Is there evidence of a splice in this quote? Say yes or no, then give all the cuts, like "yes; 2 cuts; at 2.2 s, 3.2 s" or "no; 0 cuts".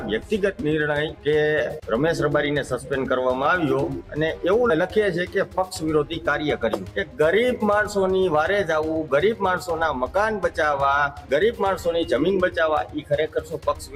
no; 0 cuts